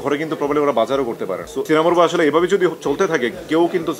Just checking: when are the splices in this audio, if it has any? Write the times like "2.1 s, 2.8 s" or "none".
1.6 s